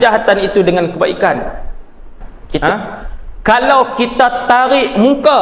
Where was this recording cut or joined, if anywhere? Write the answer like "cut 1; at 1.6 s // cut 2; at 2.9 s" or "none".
cut 1; at 2.6 s